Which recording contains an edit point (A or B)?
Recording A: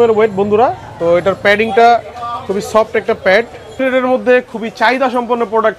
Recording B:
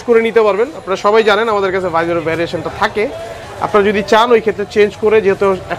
A